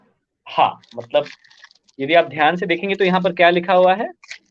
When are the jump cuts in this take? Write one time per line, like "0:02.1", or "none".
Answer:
none